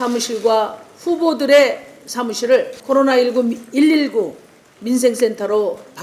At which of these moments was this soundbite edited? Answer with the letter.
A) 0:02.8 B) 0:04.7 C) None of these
A